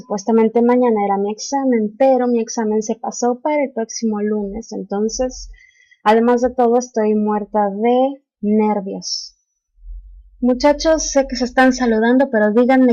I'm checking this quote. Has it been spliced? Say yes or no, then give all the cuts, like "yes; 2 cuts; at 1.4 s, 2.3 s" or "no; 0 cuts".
no; 0 cuts